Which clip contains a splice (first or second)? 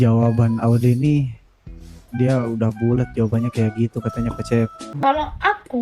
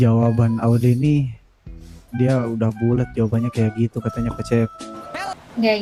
first